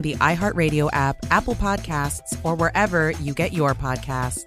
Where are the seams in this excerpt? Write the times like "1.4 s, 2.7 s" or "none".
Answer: none